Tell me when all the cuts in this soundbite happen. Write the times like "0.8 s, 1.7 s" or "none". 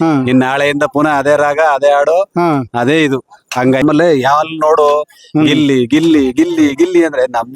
3.8 s